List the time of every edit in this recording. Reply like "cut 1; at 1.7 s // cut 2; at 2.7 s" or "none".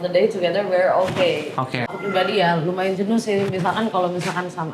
cut 1; at 1.9 s